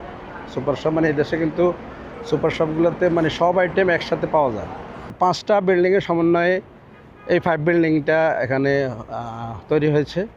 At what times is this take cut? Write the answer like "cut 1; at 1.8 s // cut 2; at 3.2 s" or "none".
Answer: cut 1; at 5.1 s